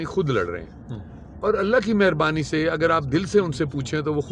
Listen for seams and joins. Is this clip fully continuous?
yes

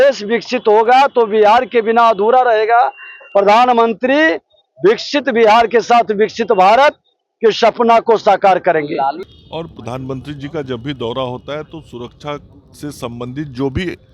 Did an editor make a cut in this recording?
yes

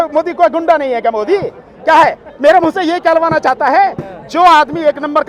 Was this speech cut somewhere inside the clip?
no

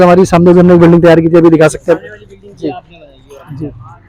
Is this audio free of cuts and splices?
yes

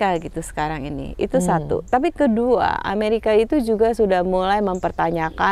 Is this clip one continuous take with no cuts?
yes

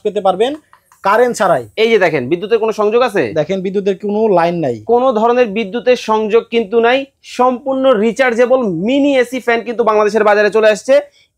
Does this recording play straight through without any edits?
yes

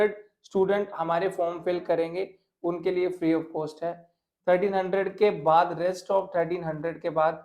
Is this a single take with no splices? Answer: yes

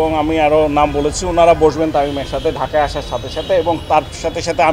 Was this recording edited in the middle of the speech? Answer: no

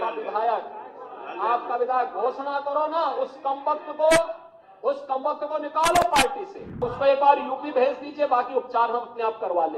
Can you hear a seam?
yes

